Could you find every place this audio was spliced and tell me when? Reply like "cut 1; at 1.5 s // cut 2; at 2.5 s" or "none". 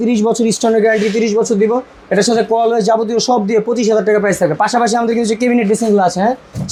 none